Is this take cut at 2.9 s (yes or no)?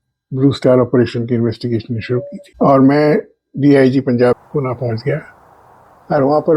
no